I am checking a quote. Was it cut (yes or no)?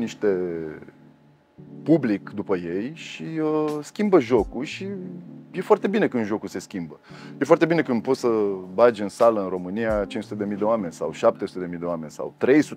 no